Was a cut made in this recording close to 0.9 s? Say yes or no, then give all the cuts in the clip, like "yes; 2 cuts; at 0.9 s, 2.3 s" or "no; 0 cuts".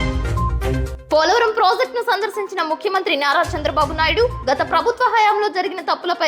yes; 1 cut; at 0.9 s